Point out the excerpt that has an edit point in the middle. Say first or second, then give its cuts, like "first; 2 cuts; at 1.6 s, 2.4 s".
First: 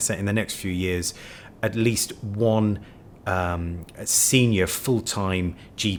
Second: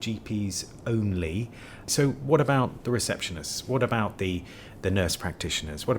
second; 1 cut; at 1.9 s